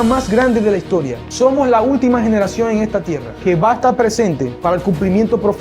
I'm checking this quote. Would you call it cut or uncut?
cut